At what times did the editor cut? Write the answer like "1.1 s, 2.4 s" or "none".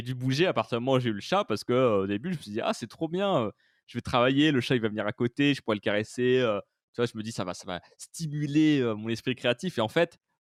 none